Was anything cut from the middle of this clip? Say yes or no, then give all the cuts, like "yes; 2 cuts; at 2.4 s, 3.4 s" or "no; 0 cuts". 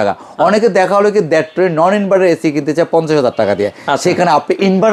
no; 0 cuts